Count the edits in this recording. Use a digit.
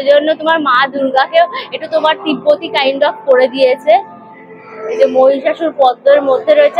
0